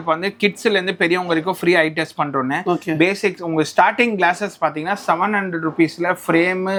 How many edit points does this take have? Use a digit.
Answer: 0